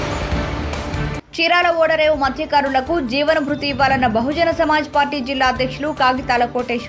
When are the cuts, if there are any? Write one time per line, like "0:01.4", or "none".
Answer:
none